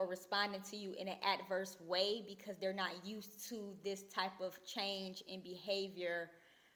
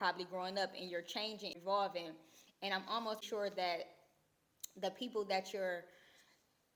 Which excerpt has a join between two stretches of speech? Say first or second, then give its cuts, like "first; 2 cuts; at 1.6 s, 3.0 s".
second; 2 cuts; at 1.6 s, 3.2 s